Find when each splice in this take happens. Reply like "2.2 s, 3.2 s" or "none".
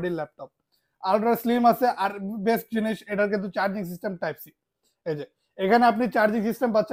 none